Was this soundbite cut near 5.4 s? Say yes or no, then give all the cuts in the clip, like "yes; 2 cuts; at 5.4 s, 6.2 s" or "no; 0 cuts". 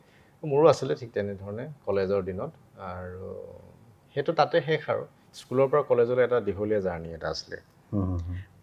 no; 0 cuts